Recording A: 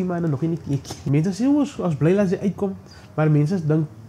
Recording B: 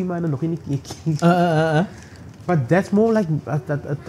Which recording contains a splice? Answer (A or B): A